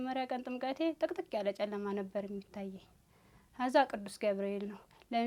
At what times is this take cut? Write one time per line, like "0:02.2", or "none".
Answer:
none